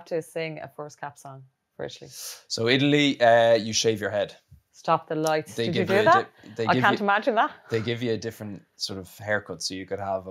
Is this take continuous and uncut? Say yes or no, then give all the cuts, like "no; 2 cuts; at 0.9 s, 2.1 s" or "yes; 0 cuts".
yes; 0 cuts